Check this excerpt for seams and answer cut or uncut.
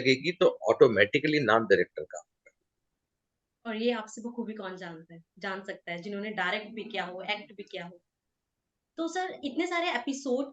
uncut